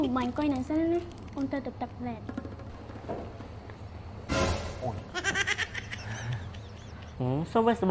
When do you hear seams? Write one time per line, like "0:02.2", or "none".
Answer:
0:02.6
0:07.0